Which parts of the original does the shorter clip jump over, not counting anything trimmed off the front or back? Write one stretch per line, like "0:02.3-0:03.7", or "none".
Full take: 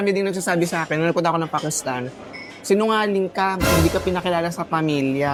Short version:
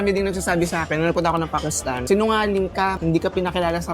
0:02.0-0:02.6
0:03.6-0:03.7